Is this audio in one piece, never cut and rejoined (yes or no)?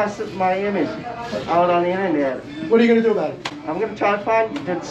yes